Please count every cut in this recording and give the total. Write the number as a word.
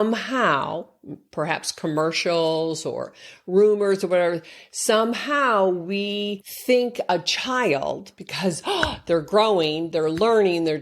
one